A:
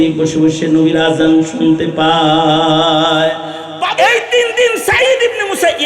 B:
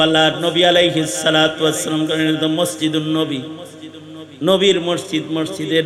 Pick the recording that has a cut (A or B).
A